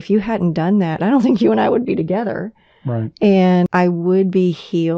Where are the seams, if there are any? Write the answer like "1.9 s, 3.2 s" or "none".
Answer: 0.9 s, 3.7 s

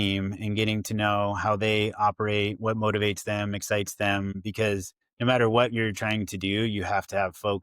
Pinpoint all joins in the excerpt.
4.6 s

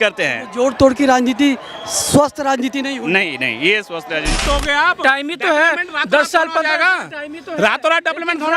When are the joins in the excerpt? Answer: 4.4 s

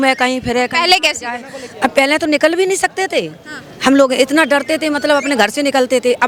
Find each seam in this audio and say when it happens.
none

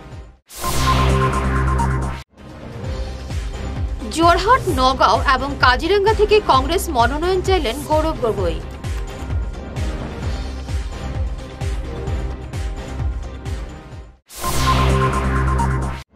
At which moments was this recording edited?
2.0 s

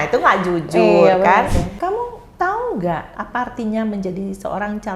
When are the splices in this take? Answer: 1.7 s, 3.1 s

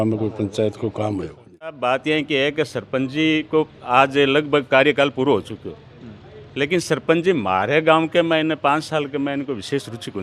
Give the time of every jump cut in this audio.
1.7 s

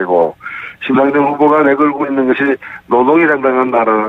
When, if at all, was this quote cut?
0.9 s

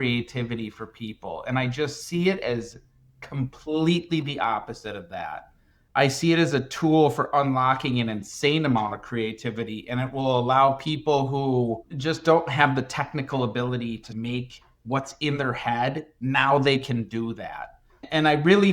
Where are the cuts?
11.9 s, 14.1 s

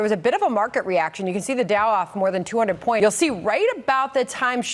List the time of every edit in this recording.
3.0 s

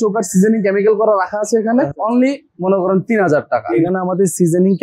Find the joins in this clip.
2.0 s, 3.9 s

